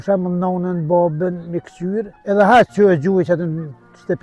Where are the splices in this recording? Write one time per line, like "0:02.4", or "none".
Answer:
0:02.1